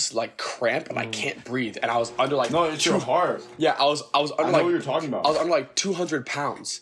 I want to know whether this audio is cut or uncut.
uncut